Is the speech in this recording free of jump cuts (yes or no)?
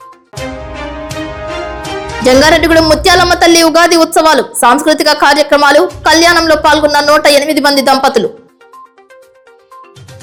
yes